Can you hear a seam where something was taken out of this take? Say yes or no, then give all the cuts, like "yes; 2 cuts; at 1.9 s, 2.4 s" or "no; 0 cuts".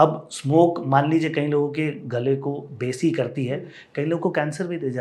no; 0 cuts